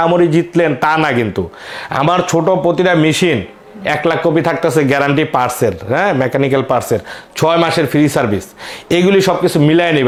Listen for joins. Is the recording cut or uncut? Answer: uncut